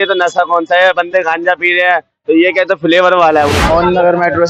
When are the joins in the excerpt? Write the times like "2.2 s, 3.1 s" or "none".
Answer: 3.6 s